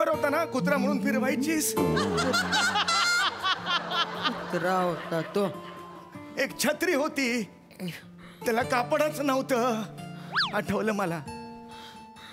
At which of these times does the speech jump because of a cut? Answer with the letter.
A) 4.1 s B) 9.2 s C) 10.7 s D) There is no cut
D